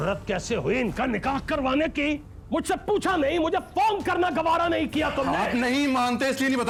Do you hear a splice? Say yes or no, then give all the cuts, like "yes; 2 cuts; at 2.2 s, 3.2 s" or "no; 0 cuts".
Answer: no; 0 cuts